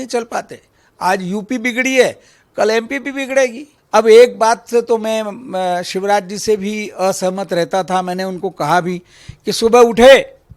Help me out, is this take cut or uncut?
cut